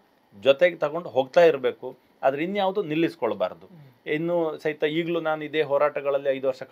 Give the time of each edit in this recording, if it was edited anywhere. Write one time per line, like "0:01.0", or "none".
none